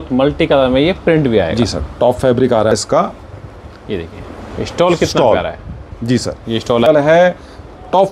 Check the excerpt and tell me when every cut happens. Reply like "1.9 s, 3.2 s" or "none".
2.8 s, 6.9 s